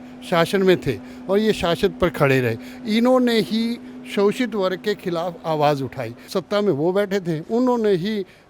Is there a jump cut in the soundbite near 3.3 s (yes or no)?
no